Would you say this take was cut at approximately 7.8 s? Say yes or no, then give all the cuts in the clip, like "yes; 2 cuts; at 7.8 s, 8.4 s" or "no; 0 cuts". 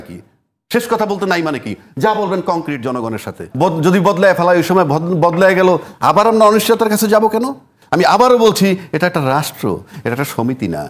yes; 2 cuts; at 3.5 s, 7.8 s